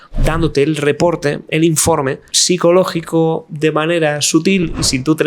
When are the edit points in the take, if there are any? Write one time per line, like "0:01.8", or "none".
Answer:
0:02.3